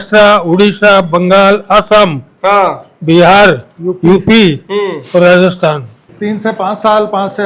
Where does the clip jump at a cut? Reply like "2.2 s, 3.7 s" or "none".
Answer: 6.1 s